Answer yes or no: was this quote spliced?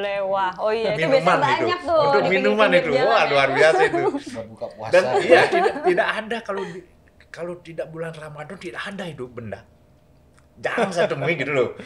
no